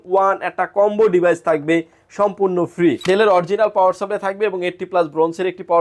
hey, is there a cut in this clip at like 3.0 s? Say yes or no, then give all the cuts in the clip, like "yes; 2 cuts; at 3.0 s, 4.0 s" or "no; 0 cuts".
yes; 1 cut; at 3.0 s